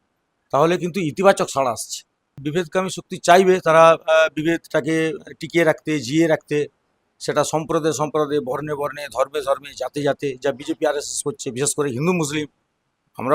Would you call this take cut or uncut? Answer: cut